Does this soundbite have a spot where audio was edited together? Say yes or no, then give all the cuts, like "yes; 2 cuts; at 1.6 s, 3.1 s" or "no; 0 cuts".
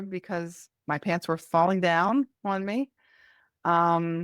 no; 0 cuts